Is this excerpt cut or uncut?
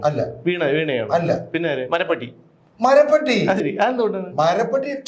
cut